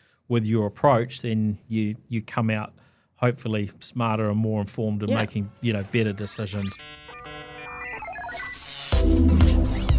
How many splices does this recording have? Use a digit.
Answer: 2